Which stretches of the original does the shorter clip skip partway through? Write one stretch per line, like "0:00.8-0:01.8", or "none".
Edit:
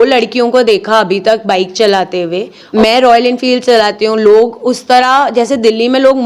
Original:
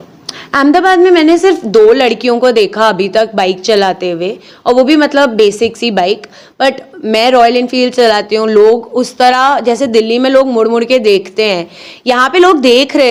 0:04.5-0:06.9